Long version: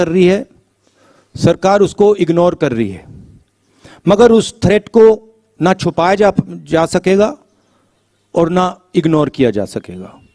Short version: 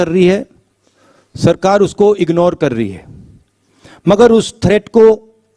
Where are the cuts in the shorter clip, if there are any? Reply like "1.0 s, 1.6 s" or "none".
none